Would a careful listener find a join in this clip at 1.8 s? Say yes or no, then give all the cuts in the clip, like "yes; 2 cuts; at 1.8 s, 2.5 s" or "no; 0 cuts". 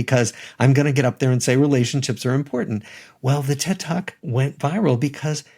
no; 1 cut; at 4.2 s